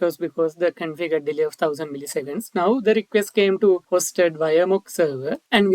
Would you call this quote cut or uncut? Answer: cut